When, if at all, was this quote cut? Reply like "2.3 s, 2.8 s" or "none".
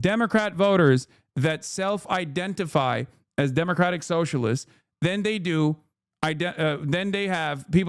none